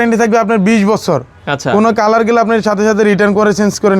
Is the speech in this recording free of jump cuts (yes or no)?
yes